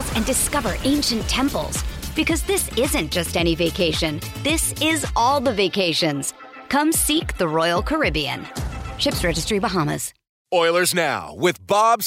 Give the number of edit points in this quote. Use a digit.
1